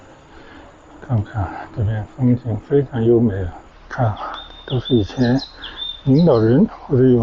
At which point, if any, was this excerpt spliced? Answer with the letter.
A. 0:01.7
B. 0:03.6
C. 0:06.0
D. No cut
B